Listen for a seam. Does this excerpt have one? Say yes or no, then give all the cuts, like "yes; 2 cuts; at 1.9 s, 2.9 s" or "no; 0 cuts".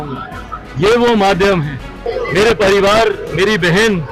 yes; 1 cut; at 2.0 s